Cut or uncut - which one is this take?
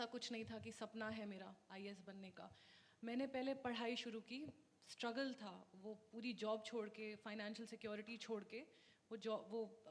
uncut